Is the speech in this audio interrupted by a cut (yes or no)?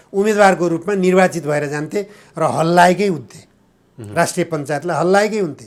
no